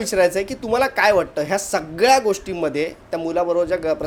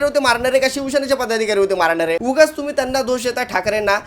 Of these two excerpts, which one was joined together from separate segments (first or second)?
second